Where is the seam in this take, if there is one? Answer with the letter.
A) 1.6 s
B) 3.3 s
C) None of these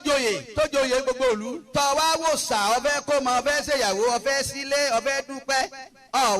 A